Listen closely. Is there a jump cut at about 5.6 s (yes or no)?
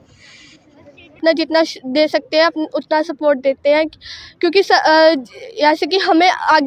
no